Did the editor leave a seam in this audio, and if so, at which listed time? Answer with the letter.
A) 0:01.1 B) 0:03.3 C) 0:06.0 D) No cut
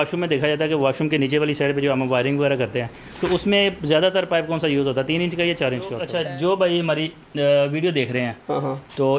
C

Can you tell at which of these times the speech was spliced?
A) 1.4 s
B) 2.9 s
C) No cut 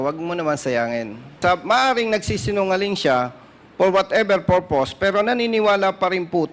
A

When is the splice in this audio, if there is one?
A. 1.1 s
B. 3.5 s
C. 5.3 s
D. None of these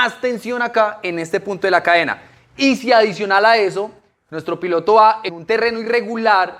C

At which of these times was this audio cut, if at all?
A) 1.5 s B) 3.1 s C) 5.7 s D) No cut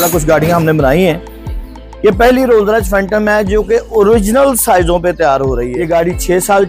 C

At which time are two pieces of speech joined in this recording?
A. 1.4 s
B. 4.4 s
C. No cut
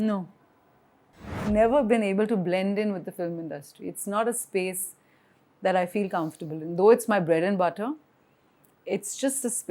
A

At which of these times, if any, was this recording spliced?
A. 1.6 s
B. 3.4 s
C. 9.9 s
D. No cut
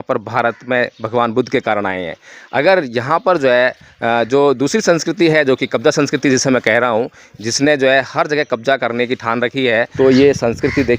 C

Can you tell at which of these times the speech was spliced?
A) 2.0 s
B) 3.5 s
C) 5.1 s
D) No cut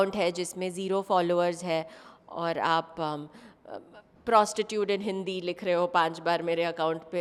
D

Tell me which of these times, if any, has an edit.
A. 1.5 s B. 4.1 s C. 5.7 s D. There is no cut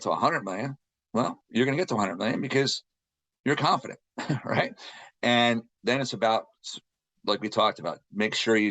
C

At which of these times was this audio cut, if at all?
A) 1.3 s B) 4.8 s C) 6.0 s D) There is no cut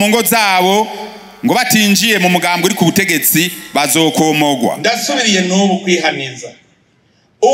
B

